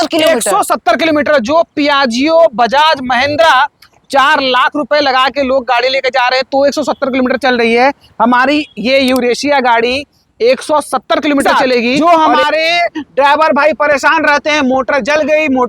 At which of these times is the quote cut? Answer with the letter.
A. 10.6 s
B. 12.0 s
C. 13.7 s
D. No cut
B